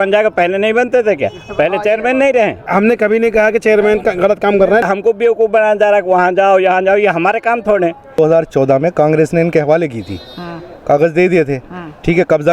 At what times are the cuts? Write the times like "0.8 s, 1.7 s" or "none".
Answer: 2.7 s, 4.8 s, 8.1 s